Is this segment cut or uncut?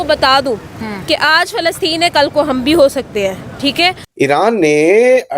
cut